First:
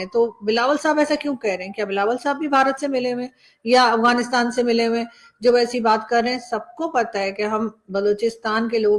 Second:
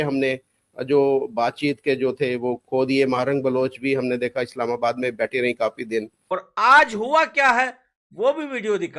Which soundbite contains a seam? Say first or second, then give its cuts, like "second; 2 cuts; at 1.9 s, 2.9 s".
second; 1 cut; at 6.2 s